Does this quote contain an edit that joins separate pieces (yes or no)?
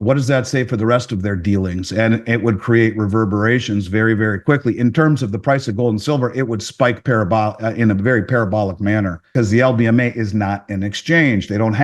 yes